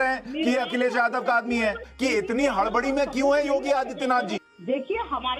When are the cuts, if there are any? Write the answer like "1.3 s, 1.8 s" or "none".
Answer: 1.9 s, 4.5 s